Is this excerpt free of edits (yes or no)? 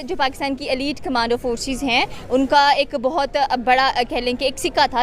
yes